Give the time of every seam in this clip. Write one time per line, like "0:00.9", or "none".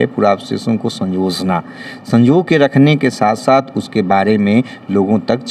none